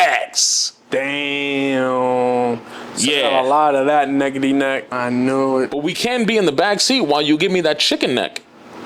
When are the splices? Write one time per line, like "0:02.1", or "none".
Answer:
0:04.9